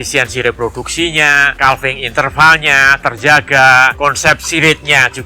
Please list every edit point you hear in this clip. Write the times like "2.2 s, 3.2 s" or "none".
1.5 s, 3.9 s